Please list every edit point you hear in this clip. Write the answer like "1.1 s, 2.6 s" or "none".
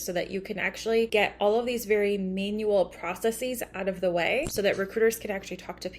1.1 s, 4.5 s